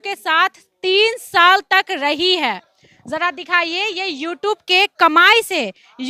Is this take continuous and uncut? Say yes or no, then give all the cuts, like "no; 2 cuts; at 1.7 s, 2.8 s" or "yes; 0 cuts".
yes; 0 cuts